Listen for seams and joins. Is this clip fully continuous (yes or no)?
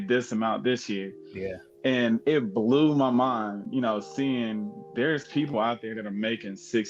yes